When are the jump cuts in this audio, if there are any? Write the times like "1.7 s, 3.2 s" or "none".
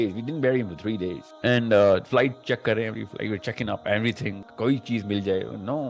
1.3 s, 4.4 s